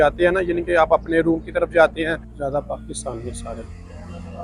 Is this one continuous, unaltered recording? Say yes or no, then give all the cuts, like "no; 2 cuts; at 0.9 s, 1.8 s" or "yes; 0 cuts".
no; 1 cut; at 2.3 s